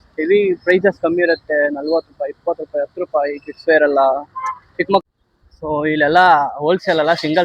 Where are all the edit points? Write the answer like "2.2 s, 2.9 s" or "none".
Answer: 5.0 s